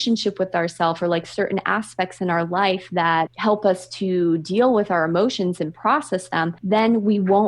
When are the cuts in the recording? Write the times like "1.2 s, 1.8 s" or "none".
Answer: 3.3 s